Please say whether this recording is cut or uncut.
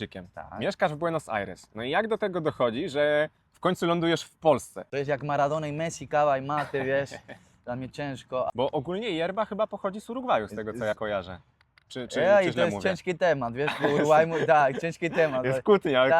cut